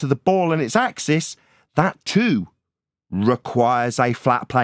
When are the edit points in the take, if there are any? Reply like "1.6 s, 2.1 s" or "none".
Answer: none